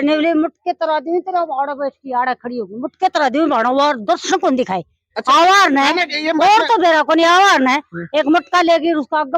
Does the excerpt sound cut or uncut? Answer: uncut